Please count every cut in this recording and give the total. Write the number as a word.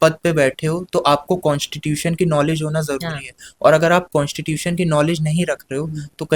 zero